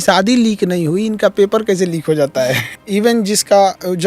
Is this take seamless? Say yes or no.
no